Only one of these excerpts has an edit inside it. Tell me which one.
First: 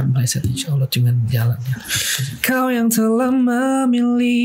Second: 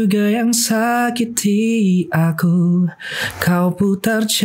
first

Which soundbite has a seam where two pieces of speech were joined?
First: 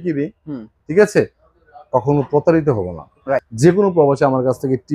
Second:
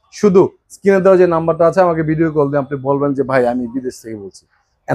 first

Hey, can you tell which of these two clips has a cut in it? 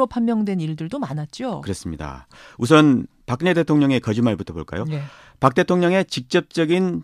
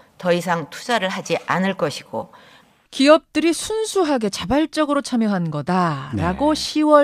first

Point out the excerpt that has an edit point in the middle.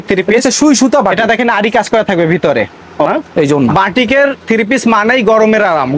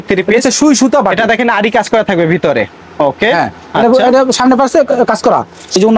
first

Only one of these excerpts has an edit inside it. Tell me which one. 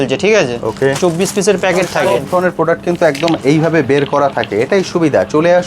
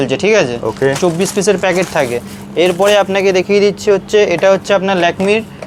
first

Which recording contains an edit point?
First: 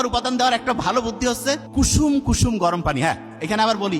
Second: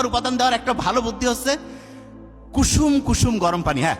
first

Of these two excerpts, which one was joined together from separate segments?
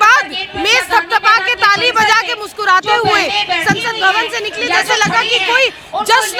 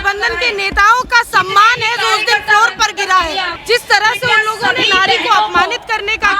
second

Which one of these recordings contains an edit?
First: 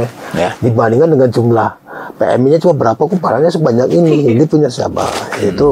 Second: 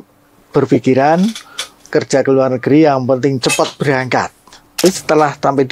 second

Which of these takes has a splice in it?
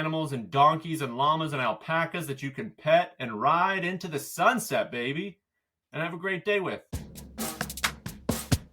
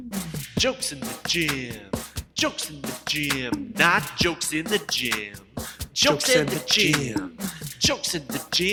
first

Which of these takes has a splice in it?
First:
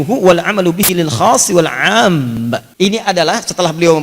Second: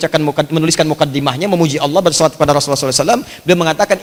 first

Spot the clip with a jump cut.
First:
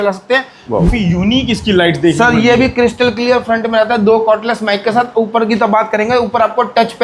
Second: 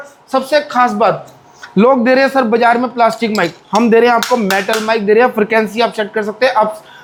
first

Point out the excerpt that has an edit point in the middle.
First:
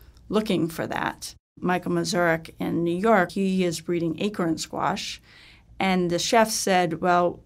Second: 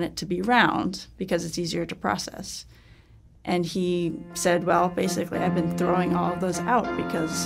first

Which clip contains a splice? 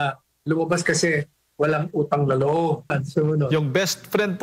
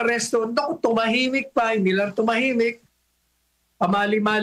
first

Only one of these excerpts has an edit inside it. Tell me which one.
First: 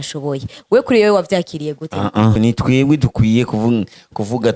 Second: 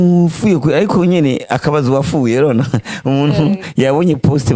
first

